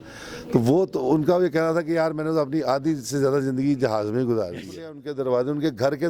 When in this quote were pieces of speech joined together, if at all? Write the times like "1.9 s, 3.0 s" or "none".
5.1 s